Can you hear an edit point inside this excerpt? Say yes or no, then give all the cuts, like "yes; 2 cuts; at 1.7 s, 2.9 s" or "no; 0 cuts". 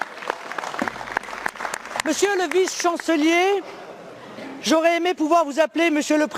no; 0 cuts